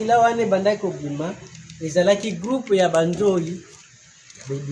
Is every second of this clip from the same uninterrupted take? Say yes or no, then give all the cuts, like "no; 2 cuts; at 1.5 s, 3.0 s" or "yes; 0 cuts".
yes; 0 cuts